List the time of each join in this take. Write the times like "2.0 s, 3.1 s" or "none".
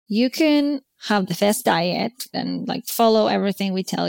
0.9 s, 2.4 s